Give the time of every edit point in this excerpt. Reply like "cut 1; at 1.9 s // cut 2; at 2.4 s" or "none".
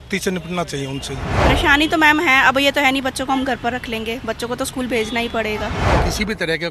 cut 1; at 1.4 s // cut 2; at 5.9 s